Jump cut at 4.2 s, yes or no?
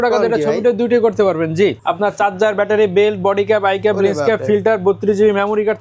no